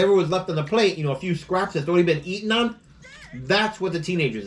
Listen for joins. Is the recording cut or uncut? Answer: uncut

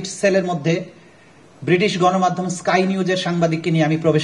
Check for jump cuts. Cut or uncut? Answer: uncut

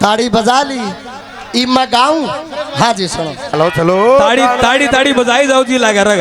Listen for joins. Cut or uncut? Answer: cut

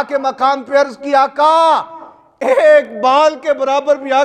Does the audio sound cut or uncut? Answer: uncut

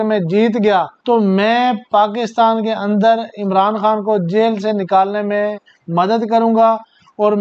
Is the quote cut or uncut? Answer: cut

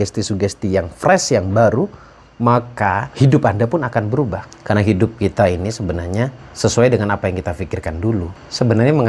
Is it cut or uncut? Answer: uncut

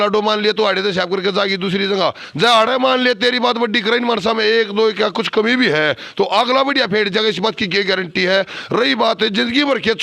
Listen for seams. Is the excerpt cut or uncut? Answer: uncut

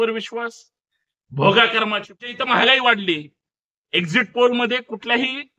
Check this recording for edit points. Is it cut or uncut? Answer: cut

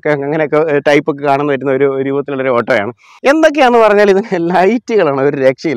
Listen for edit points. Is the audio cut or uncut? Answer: cut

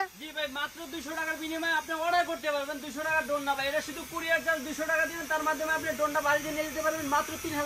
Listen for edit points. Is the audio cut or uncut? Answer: uncut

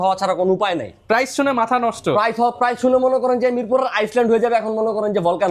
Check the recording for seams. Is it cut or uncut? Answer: uncut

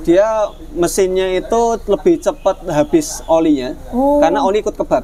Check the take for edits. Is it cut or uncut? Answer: uncut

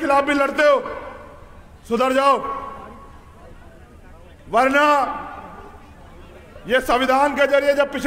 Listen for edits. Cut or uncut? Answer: uncut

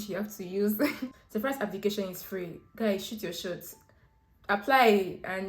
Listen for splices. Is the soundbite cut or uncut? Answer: cut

